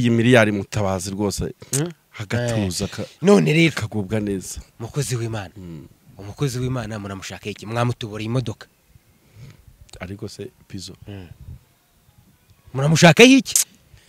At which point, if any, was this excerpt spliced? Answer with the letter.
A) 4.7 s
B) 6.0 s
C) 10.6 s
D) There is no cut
D